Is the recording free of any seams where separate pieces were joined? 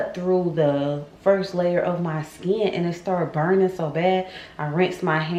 yes; 0 cuts

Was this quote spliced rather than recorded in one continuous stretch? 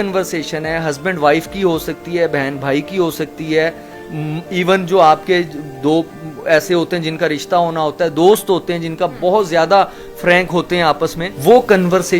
no; 0 cuts

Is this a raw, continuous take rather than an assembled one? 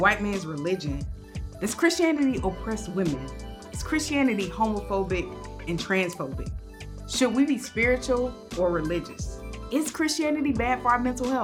yes; 0 cuts

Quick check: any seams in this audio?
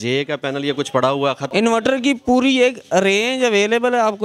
yes; 1 cut; at 1.4 s

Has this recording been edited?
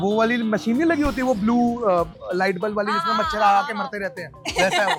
no; 0 cuts

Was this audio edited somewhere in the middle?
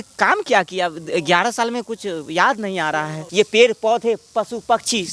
yes; 1 cut; at 3.2 s

